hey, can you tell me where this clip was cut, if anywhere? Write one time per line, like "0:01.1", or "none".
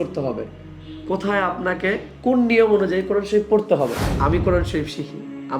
0:04.1